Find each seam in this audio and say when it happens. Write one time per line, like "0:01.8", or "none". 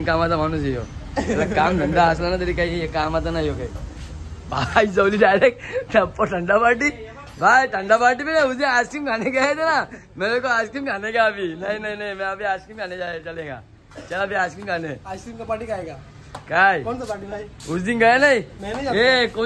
none